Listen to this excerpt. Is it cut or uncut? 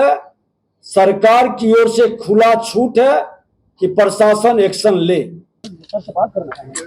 cut